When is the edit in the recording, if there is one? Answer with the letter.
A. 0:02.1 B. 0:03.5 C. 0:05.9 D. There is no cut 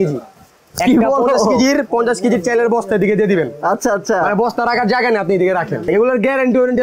C